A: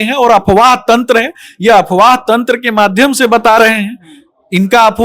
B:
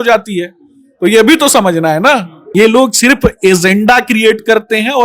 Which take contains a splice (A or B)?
B